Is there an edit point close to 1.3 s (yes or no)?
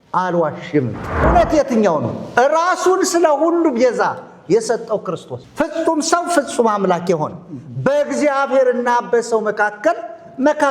yes